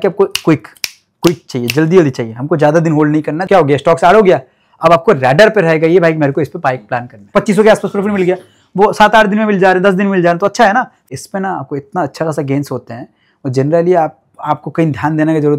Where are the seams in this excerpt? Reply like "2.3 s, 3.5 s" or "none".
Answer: 3.4 s, 7.3 s, 10.9 s